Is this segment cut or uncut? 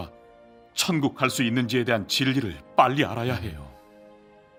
uncut